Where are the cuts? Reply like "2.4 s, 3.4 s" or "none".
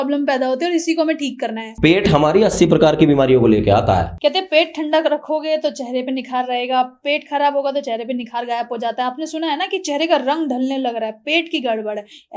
4.1 s